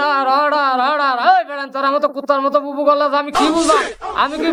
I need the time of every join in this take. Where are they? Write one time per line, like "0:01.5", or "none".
none